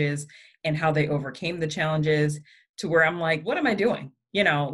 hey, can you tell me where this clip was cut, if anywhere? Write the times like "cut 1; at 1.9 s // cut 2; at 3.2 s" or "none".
cut 1; at 3.5 s